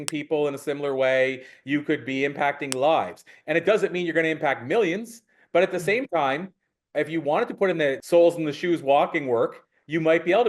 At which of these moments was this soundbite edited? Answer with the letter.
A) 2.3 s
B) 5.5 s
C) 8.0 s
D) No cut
C